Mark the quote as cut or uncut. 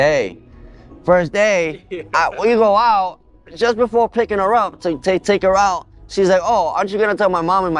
uncut